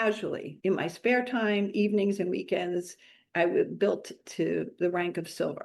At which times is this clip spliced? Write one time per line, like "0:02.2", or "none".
none

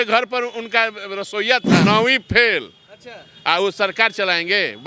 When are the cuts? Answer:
0:01.8

